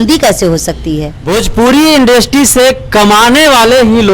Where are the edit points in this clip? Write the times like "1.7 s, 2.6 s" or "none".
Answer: 1.1 s